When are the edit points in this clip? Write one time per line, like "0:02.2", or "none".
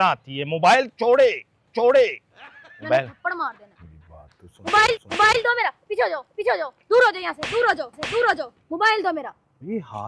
0:03.6